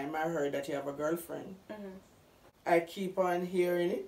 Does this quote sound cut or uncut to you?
cut